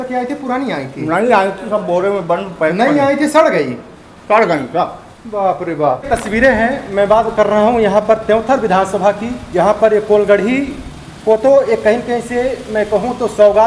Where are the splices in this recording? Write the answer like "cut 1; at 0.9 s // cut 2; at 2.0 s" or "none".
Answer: cut 1; at 6.1 s